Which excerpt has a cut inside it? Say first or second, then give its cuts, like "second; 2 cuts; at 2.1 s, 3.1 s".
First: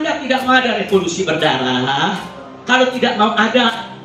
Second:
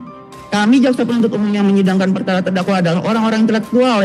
first; 1 cut; at 1.5 s